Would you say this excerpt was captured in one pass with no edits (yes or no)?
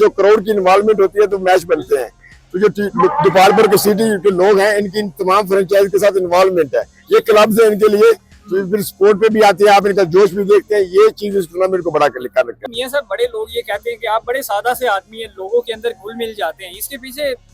no